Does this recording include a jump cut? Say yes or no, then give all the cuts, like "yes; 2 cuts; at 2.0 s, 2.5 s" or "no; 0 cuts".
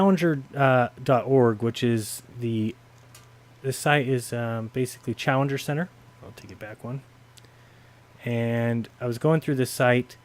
yes; 1 cut; at 5.0 s